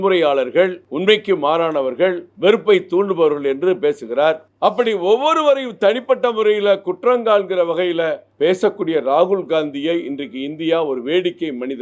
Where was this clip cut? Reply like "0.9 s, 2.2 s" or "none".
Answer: 4.4 s